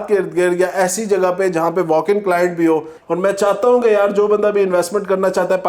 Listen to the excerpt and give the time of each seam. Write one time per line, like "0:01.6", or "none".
0:03.0